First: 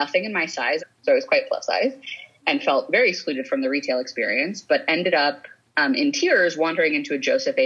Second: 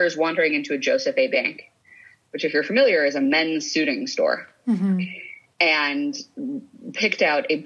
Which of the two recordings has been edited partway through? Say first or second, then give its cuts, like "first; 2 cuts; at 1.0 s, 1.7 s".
first; 1 cut; at 0.9 s